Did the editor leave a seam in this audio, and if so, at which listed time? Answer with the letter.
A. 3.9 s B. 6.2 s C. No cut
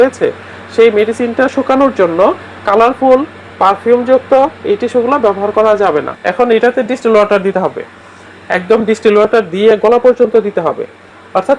B